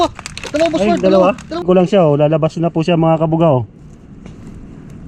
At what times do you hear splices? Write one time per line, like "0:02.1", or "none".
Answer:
0:01.6